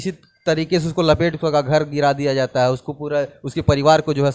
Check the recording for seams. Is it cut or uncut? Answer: uncut